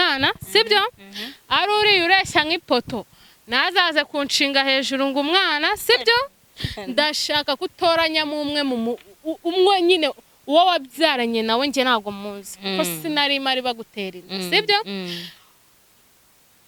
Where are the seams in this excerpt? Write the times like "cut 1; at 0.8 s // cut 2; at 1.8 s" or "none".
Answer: none